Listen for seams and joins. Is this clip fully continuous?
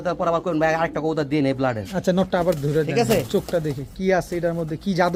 yes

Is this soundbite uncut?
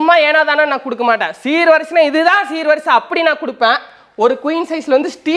yes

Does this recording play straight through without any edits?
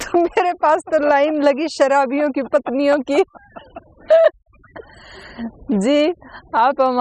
yes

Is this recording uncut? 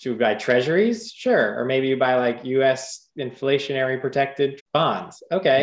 no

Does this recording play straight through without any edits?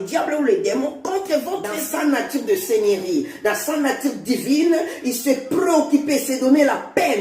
no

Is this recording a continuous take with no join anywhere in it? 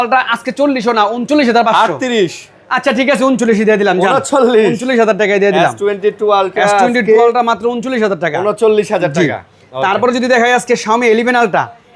yes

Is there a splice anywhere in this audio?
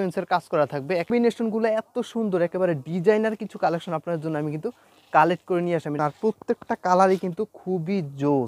yes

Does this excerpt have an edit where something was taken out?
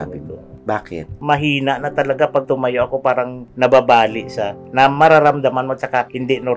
yes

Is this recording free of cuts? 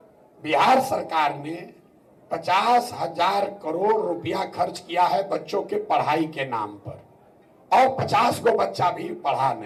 yes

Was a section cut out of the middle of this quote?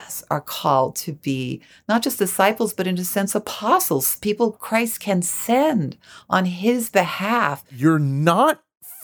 yes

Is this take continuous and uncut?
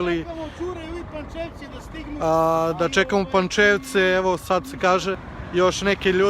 no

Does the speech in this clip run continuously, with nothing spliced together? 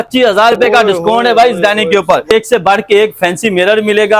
no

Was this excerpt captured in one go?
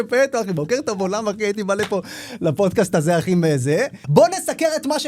no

